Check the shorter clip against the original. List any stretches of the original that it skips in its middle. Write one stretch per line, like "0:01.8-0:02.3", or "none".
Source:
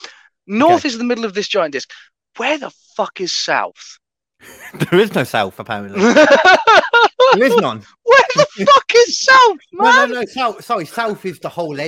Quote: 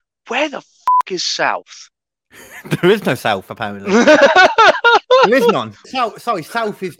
0:07.9-0:10.2